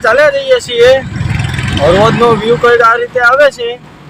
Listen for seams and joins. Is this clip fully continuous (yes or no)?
yes